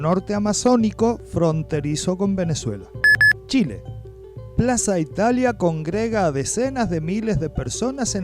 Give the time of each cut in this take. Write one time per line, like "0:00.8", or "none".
0:02.9